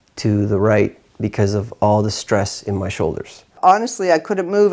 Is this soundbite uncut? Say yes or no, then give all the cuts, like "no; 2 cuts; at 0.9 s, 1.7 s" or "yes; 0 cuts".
no; 1 cut; at 3.5 s